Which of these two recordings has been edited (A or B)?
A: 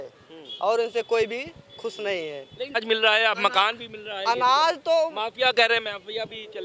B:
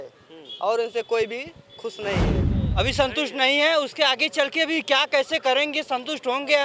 B